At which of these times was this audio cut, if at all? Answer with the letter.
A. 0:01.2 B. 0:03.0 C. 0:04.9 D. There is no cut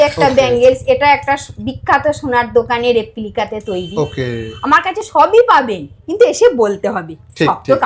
D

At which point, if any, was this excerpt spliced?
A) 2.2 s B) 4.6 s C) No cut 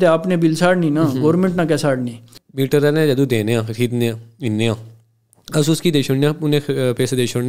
A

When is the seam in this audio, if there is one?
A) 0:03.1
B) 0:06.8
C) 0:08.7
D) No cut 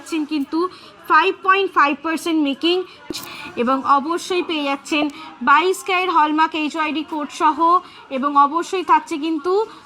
A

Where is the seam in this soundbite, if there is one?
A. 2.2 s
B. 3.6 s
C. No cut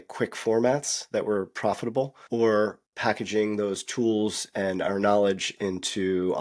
A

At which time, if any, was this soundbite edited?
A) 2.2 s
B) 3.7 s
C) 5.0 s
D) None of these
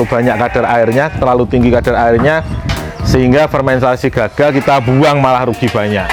D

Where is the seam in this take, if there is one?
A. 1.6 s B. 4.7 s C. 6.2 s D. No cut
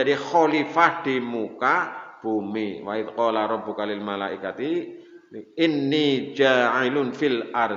D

